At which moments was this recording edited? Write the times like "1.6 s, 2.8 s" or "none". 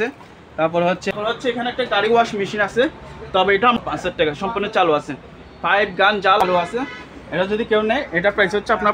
1.1 s, 3.8 s, 6.4 s